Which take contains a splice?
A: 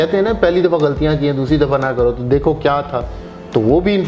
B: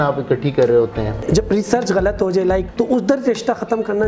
B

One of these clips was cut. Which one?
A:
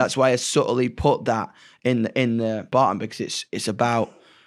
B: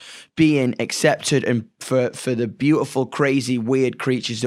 A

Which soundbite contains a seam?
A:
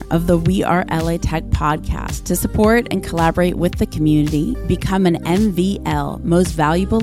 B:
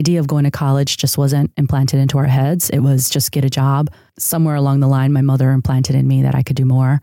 B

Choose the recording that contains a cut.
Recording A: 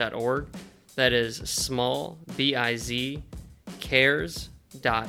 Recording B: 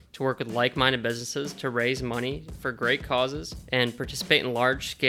B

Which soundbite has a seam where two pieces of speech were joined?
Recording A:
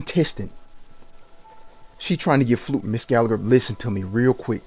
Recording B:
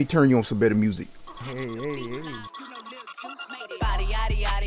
B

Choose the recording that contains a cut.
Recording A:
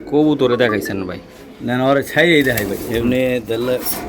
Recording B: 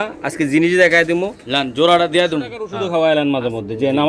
B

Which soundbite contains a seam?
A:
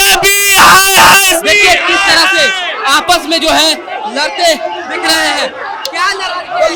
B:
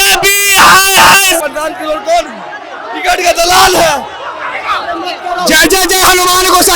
B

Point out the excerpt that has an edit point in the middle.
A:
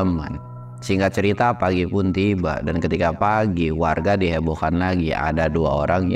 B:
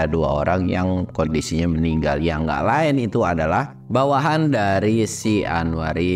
B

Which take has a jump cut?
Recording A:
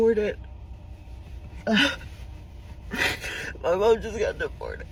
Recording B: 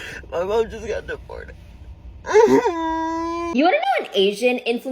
B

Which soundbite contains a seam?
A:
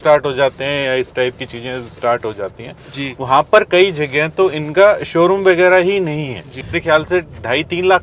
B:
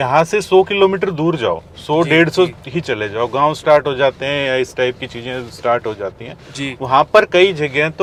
A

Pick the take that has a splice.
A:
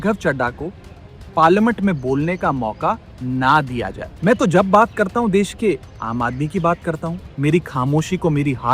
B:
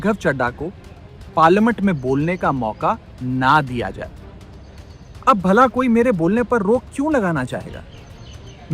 A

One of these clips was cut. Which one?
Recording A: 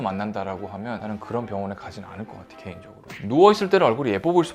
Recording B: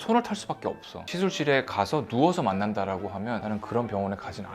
B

